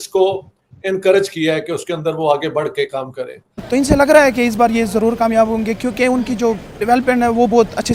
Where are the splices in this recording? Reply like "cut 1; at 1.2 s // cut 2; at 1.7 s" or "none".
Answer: cut 1; at 3.7 s